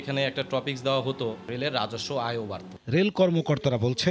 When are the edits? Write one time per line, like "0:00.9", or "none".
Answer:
none